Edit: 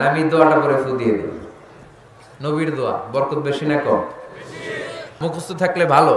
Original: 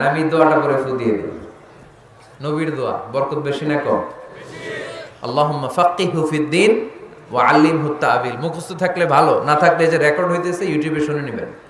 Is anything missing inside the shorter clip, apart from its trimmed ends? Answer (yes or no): yes